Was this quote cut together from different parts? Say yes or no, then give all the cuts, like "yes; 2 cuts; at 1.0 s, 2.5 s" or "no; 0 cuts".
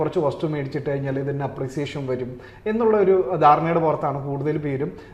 no; 0 cuts